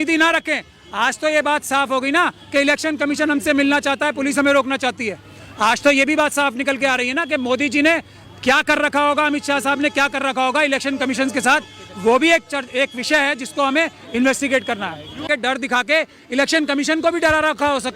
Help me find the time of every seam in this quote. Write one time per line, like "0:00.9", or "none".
0:15.3